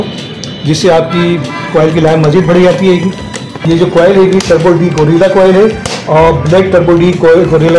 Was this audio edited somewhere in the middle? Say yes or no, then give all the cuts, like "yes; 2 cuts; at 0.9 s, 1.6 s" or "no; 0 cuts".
no; 0 cuts